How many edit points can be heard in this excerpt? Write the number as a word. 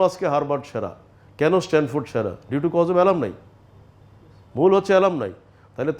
zero